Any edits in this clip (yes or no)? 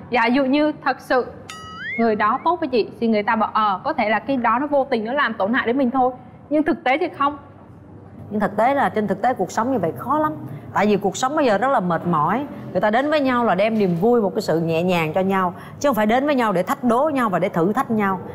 no